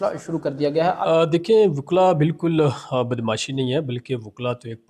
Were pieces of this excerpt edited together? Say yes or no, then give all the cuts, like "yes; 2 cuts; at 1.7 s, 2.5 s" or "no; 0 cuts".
yes; 1 cut; at 1.0 s